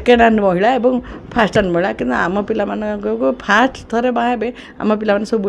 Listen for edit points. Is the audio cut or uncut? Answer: uncut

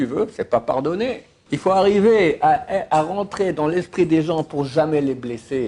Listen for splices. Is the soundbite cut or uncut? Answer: cut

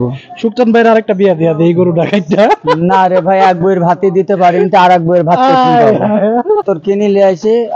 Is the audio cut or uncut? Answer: cut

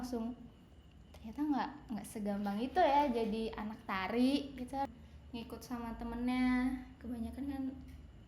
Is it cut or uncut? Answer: cut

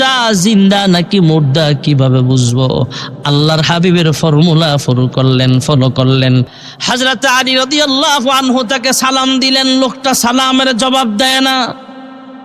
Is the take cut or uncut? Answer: cut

